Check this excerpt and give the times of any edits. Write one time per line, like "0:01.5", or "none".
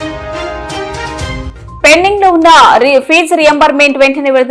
0:01.5